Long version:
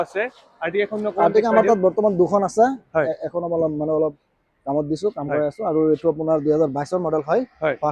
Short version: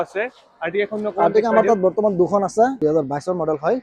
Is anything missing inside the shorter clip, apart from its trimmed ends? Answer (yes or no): yes